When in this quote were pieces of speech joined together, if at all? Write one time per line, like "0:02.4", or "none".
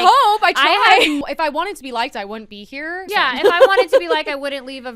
0:01.2
0:03.0